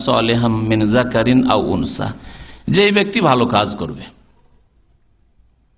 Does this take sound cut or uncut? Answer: uncut